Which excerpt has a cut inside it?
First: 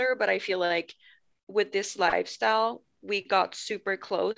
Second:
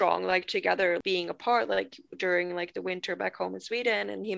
second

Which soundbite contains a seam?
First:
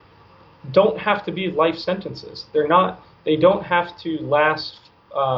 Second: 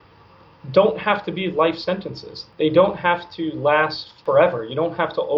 second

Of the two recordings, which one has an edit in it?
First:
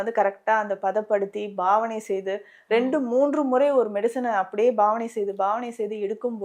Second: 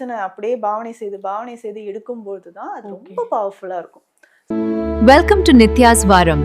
second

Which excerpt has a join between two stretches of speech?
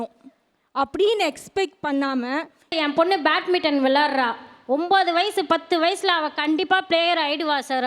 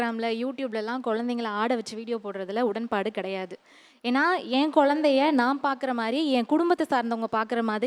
first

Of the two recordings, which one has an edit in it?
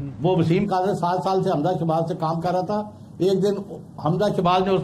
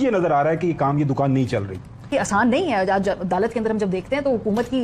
second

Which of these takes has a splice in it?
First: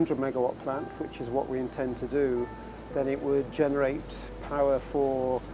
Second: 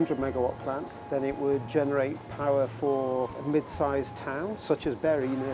second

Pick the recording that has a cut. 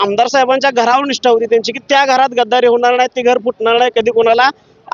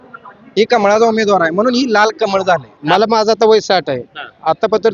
second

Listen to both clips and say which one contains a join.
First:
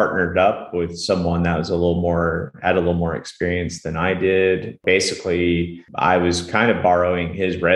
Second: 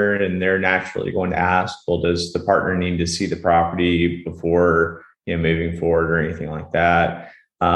first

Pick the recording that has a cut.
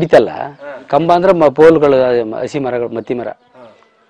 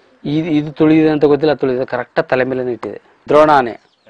second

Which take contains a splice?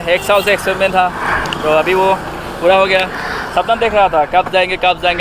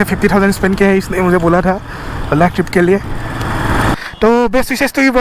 second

